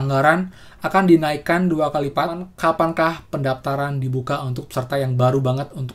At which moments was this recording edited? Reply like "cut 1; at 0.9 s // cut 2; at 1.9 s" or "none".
cut 1; at 2.5 s

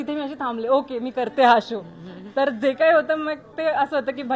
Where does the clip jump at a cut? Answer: none

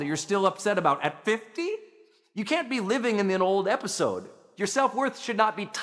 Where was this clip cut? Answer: cut 1; at 4.4 s

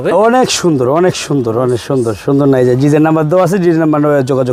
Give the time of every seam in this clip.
none

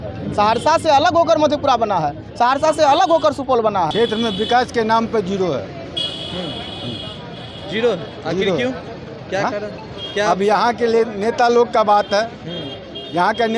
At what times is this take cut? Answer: cut 1; at 3.9 s

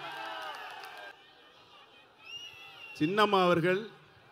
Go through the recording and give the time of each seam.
cut 1; at 1.1 s

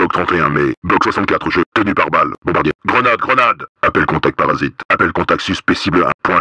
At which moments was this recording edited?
cut 1; at 1.7 s // cut 2; at 3.7 s

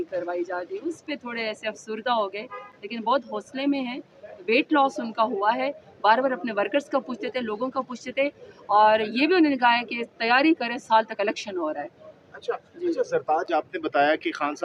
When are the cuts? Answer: none

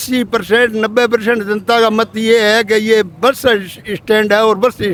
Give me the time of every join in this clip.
none

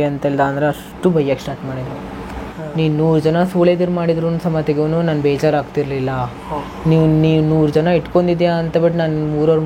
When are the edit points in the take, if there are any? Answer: cut 1; at 2.6 s

